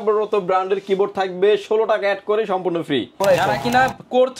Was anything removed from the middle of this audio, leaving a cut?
yes; 1 cut; at 3.1 s

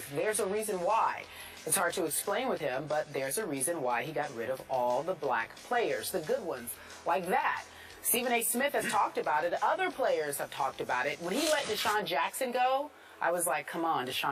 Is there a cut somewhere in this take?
no; 0 cuts

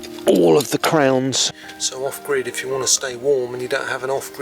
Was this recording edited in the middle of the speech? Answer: yes; 1 cut; at 1.6 s

